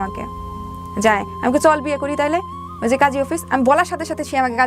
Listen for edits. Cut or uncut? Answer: uncut